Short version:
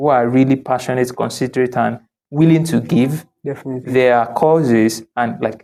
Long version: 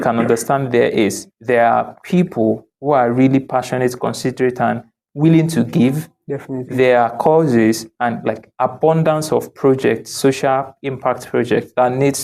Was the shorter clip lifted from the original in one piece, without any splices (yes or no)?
yes